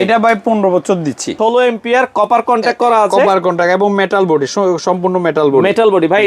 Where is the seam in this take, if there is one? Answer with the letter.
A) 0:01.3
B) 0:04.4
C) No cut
A